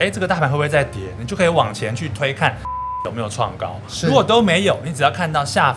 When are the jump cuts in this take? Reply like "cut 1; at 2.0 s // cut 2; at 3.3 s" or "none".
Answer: cut 1; at 2.8 s